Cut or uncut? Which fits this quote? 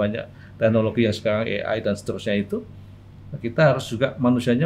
uncut